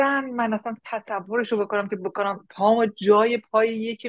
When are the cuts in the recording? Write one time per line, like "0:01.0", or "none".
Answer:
none